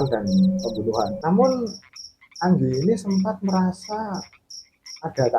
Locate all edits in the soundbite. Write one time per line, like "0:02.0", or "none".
0:01.2